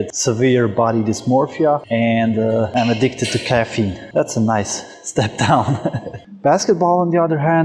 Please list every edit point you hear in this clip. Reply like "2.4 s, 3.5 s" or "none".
6.1 s